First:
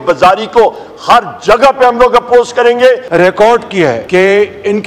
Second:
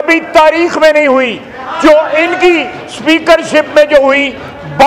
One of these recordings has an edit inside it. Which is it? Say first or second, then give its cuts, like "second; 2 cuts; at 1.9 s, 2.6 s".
first; 2 cuts; at 3.1 s, 4.0 s